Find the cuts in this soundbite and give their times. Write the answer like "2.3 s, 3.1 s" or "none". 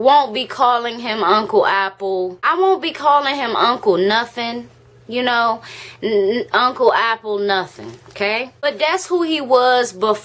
none